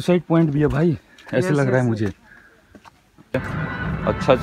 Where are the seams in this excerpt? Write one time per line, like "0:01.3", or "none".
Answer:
0:01.4
0:03.4